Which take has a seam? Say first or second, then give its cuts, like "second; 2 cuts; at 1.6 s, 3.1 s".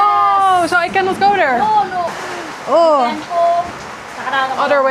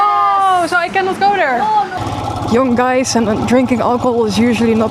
second; 1 cut; at 2.0 s